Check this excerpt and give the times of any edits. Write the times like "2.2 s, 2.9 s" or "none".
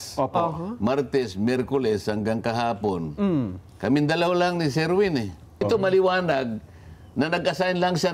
5.6 s